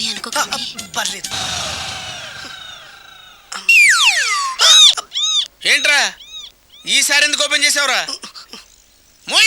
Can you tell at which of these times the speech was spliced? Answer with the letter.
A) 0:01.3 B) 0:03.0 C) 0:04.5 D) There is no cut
A